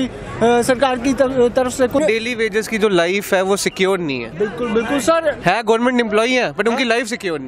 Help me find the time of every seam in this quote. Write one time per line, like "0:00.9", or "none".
0:02.0